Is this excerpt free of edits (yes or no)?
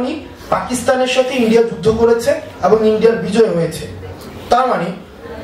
yes